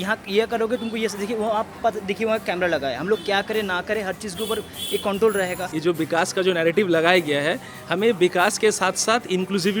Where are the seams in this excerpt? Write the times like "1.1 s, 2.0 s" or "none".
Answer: 5.7 s